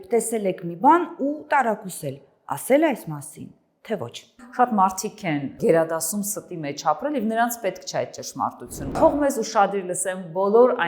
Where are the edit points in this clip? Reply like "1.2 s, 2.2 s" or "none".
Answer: 4.4 s, 5.5 s, 8.9 s